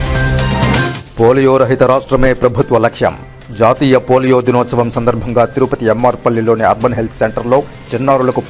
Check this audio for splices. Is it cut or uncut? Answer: cut